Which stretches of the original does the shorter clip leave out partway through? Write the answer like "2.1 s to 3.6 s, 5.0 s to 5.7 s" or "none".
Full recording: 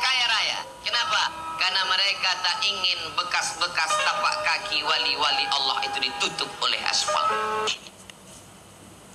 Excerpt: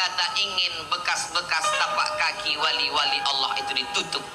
none